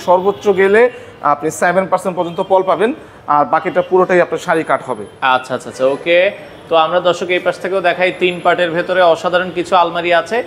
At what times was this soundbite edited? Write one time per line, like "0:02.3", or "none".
none

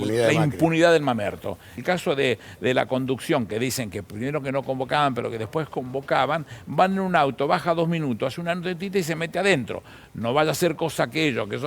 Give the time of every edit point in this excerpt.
0:01.8

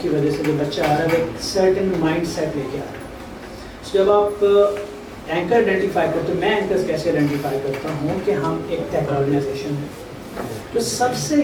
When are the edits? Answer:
none

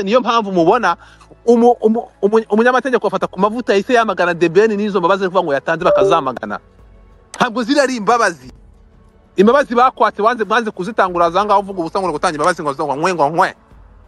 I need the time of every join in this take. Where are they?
none

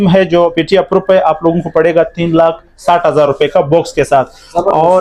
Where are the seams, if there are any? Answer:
none

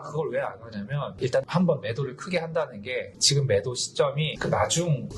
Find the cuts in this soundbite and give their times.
none

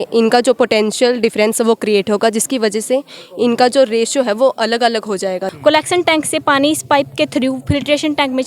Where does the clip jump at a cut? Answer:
0:05.5

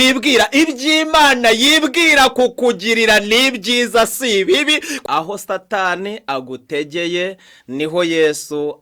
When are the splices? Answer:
0:04.9

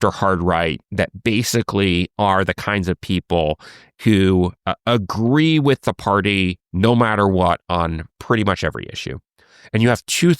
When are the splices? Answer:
0:04.0

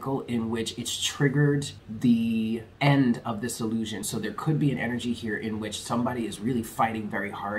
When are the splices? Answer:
0:01.8
0:02.7
0:04.0

